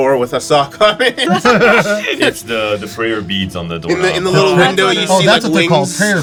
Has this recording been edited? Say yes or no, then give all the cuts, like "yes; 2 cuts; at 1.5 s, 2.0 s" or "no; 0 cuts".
no; 0 cuts